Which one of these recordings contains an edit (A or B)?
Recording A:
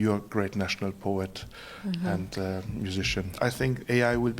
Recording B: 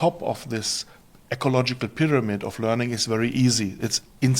A